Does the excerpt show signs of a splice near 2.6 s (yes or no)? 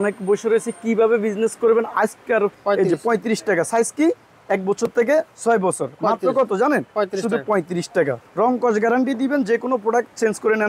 yes